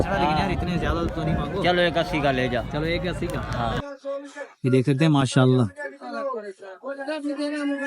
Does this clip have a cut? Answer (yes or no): yes